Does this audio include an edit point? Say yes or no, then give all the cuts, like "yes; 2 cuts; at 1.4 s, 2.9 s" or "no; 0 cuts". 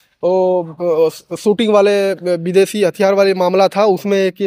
no; 0 cuts